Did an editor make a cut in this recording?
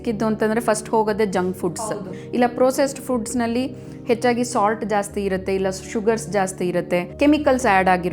yes; 2 cuts; at 1.7 s, 7.1 s

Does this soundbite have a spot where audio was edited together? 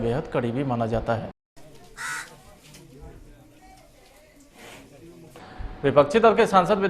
yes; 1 cut; at 5.6 s

